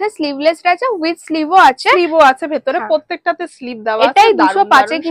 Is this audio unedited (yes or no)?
yes